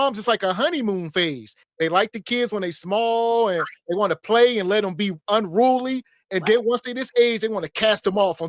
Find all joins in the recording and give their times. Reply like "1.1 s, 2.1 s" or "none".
none